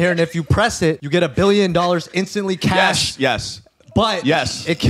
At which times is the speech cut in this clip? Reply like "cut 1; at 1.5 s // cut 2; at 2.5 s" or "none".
cut 1; at 1.0 s